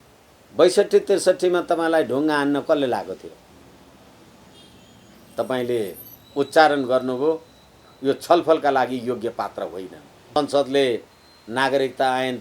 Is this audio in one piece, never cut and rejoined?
no; 2 cuts; at 3.5 s, 10.4 s

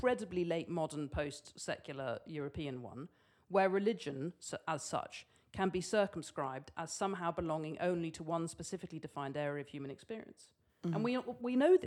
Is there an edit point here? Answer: no; 0 cuts

